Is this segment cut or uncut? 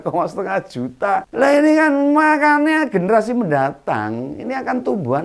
cut